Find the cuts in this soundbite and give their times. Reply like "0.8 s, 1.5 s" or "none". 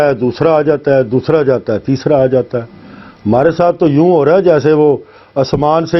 none